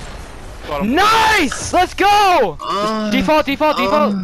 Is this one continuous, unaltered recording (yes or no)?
no